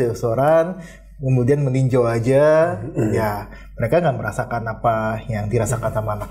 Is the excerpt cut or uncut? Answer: uncut